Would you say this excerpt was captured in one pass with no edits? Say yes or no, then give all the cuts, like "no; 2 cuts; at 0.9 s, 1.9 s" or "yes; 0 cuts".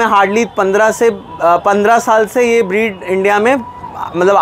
yes; 0 cuts